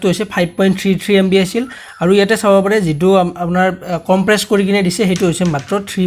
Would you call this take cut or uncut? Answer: uncut